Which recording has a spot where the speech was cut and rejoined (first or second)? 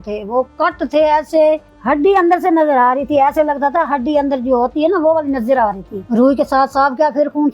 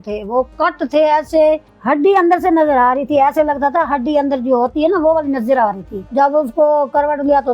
second